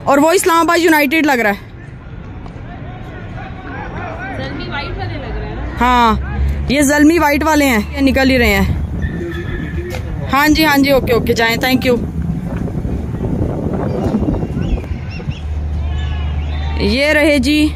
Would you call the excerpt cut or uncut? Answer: uncut